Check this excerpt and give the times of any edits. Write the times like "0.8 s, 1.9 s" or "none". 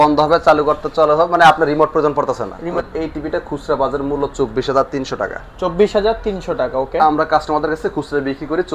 2.7 s